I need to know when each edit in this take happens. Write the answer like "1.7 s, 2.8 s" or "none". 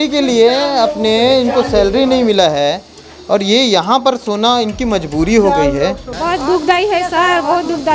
6.1 s